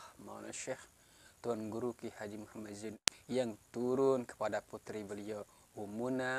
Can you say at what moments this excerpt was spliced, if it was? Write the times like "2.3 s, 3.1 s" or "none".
3.1 s